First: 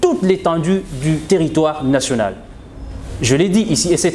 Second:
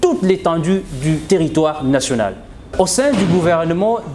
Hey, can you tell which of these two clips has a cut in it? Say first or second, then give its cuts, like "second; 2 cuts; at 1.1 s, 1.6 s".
second; 1 cut; at 2.7 s